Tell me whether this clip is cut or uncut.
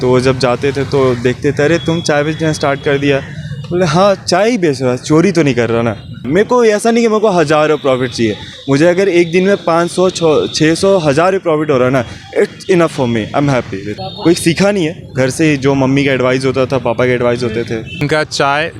cut